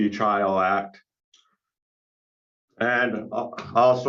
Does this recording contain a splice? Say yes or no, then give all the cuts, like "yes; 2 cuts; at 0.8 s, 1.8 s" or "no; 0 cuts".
no; 0 cuts